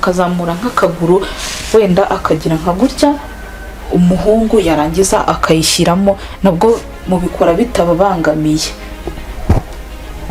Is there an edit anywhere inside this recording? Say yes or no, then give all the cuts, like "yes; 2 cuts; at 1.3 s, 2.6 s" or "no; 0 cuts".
no; 0 cuts